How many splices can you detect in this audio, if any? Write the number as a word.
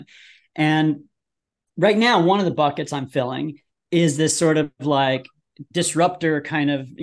zero